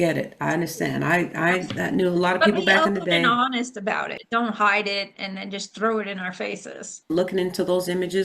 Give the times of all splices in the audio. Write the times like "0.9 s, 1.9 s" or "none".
4.2 s, 7.1 s